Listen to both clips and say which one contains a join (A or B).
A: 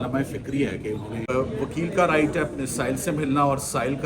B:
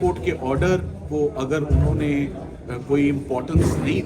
A